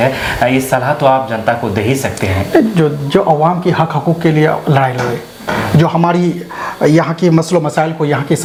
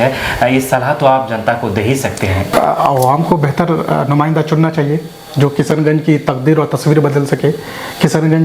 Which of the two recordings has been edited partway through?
second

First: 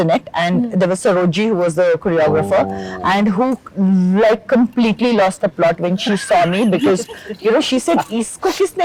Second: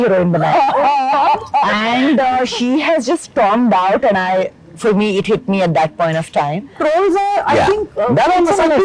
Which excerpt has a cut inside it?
second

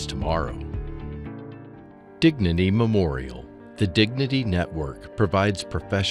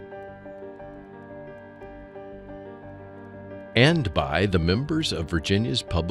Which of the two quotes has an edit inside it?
second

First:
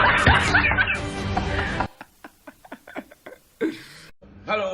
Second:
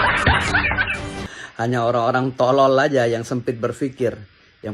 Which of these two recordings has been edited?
second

